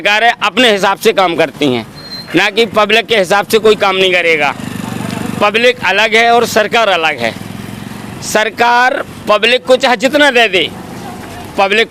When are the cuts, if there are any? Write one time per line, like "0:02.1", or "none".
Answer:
none